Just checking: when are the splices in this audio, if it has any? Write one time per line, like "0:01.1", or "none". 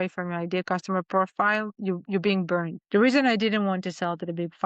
0:02.8

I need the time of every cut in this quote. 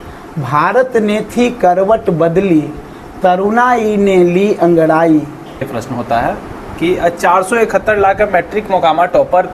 0:05.7

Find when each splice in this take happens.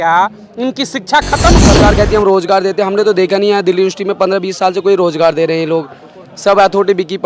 0:01.6

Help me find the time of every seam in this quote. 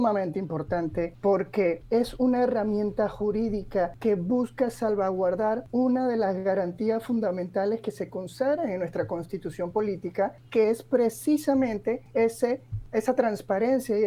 0:01.1
0:01.8
0:04.0
0:05.6
0:10.4
0:12.0
0:12.7

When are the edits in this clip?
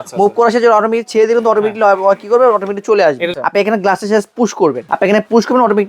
0:03.3
0:04.9

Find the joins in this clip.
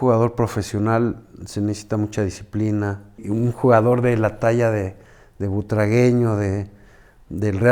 0:03.2

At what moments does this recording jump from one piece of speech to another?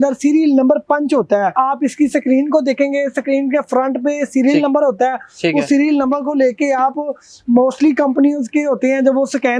0:01.5

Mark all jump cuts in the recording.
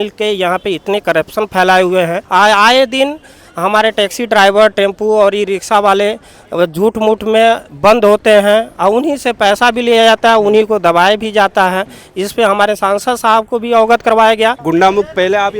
0:02.2
0:14.6

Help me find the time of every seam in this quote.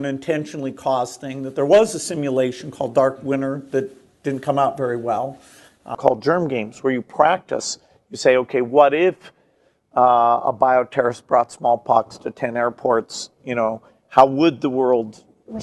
0:06.0

